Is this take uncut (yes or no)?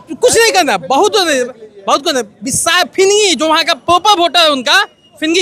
yes